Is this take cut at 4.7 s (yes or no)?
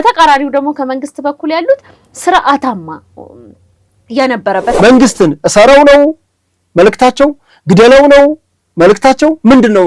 yes